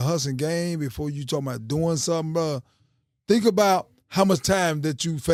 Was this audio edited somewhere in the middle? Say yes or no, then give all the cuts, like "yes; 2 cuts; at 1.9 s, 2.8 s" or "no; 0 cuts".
no; 0 cuts